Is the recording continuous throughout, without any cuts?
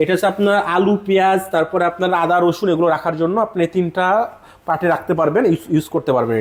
yes; 0 cuts

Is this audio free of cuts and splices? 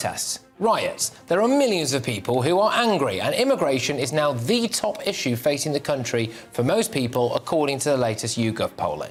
yes; 0 cuts

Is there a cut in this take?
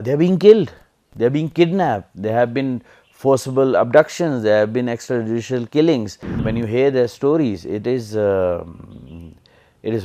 yes; 1 cut; at 6.4 s

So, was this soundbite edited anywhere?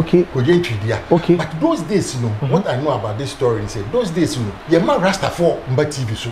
yes; 1 cut; at 4.5 s

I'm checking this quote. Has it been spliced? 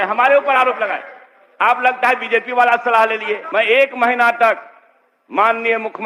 yes; 1 cut; at 3.4 s

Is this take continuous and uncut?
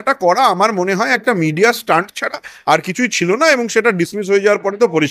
yes; 0 cuts

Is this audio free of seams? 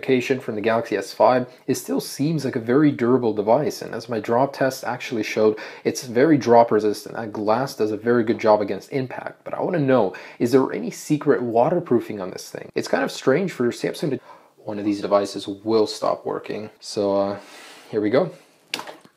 yes; 0 cuts

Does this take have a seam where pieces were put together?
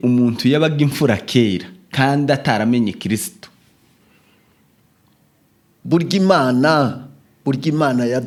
no; 0 cuts

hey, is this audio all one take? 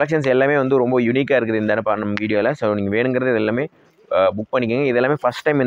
yes; 0 cuts

